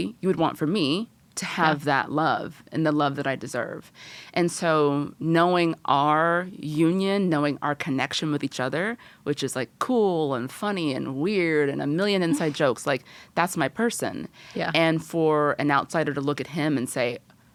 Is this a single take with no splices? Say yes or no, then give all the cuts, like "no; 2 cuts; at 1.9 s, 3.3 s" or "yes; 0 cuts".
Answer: yes; 0 cuts